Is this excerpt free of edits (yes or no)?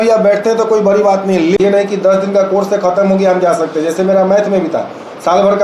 no